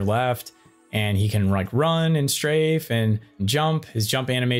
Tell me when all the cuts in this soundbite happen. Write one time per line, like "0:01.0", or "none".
0:03.5